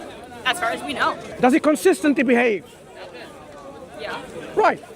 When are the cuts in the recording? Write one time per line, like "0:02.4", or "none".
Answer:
0:01.2